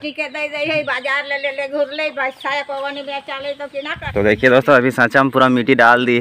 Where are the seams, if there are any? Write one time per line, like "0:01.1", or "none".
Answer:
0:04.0